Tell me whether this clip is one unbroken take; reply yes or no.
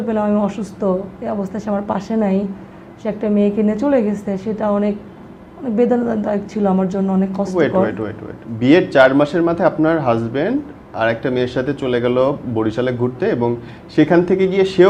yes